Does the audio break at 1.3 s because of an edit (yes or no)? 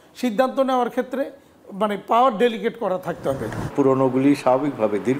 no